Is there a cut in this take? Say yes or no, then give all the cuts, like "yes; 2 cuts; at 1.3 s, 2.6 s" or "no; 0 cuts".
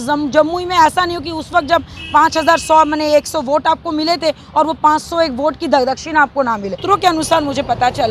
yes; 1 cut; at 6.8 s